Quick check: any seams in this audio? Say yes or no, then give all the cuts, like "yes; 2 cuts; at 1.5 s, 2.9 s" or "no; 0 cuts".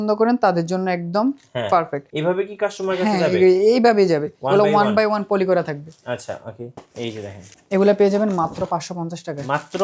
yes; 2 cuts; at 2.1 s, 6.7 s